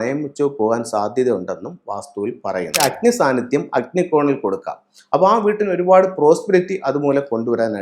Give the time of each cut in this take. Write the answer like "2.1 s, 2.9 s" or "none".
2.8 s